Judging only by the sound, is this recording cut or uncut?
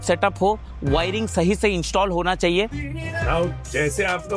uncut